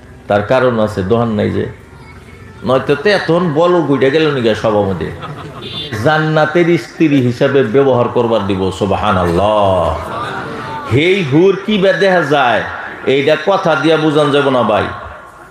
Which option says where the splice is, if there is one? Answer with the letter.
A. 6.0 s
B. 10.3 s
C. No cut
A